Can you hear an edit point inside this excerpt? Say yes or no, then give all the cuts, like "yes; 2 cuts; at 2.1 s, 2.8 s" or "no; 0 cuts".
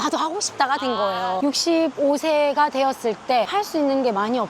yes; 1 cut; at 1.4 s